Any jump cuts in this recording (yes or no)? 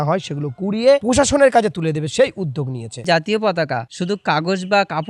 yes